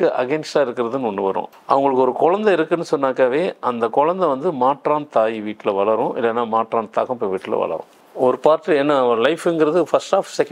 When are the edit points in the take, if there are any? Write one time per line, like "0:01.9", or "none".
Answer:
0:01.5
0:08.0